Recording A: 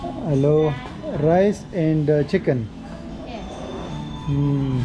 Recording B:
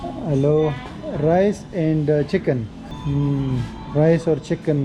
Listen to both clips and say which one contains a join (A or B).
B